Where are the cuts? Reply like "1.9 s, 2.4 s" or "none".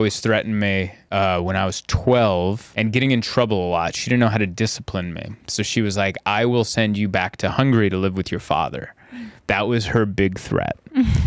1.0 s, 2.7 s